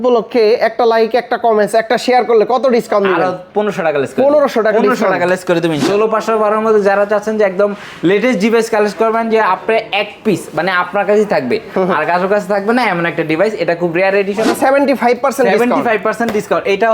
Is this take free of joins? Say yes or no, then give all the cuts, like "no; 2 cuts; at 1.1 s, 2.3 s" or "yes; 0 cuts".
no; 2 cuts; at 5.8 s, 14.5 s